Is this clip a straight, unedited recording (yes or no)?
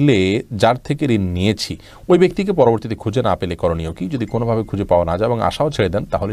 yes